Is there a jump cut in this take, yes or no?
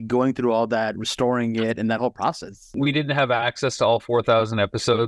yes